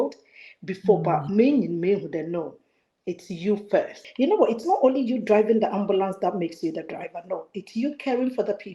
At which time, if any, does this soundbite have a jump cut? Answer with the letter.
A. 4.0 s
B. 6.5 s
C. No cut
A